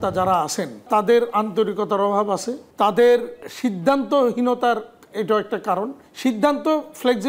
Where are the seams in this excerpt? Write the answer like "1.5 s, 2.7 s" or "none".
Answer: 0.8 s, 2.6 s, 3.4 s, 6.0 s